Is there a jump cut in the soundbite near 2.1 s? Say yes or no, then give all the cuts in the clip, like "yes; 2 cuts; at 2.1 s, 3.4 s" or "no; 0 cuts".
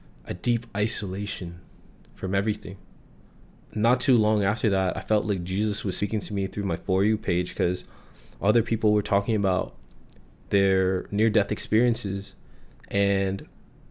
no; 1 cut; at 3.6 s